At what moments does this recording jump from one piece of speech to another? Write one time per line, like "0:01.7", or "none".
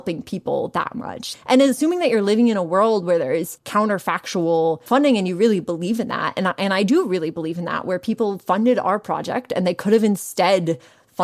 0:01.3
0:03.6
0:04.8